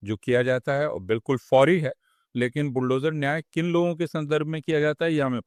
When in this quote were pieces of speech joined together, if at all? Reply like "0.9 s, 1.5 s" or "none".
none